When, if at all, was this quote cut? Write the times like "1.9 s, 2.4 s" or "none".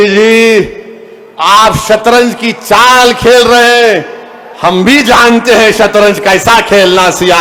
none